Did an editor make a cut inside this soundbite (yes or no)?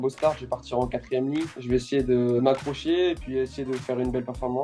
yes